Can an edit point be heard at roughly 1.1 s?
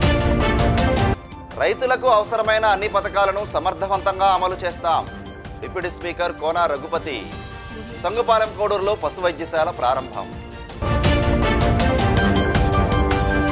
yes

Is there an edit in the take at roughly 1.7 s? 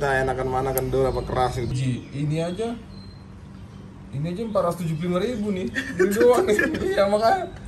yes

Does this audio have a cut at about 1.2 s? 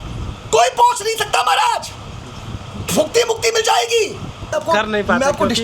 no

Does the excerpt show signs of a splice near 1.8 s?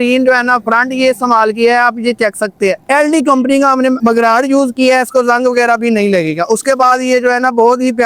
no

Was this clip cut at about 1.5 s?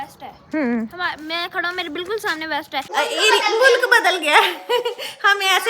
no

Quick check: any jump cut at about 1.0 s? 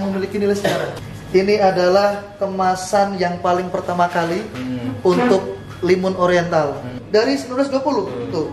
yes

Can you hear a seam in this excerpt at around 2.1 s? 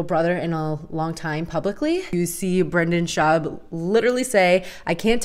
yes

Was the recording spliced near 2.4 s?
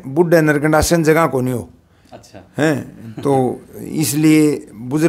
no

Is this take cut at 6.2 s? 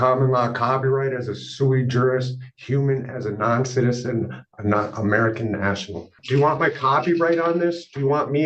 yes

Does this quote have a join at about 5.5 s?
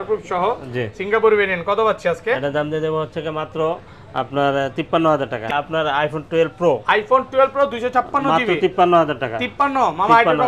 yes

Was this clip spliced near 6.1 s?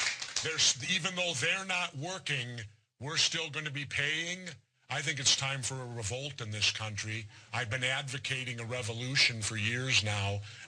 no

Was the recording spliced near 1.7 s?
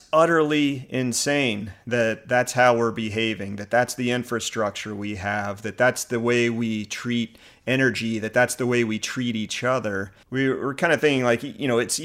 no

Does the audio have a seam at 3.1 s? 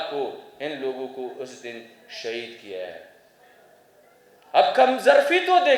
no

